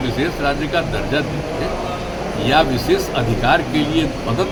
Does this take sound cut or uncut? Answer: uncut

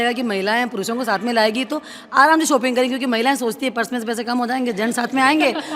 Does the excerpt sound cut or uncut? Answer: uncut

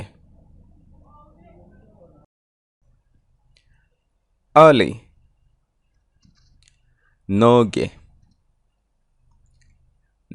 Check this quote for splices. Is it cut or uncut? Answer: cut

